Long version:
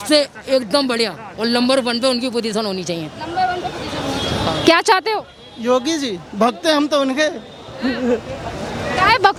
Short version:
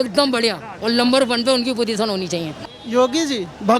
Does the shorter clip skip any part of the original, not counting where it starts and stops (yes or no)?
yes